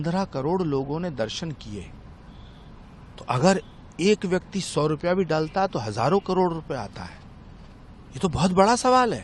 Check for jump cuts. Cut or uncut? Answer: uncut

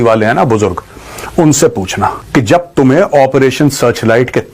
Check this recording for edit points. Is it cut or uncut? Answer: cut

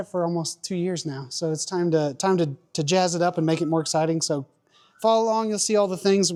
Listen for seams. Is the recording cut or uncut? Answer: uncut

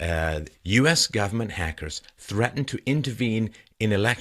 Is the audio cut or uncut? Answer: cut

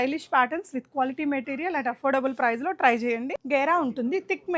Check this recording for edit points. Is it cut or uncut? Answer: cut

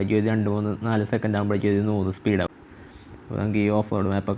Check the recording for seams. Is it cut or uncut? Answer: cut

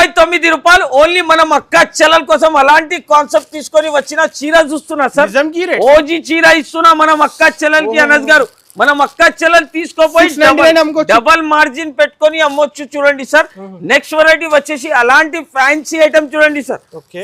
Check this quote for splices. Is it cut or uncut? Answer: uncut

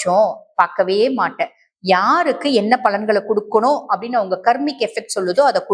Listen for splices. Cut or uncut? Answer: uncut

